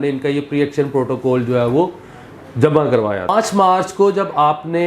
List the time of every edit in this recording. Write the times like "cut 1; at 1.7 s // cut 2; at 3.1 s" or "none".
cut 1; at 3.3 s